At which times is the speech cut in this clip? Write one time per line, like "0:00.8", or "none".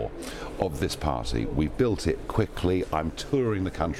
none